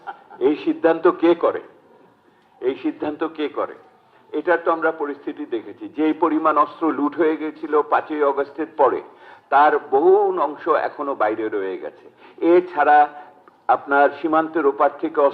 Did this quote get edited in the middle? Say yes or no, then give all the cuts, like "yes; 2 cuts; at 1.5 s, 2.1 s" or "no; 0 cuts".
no; 0 cuts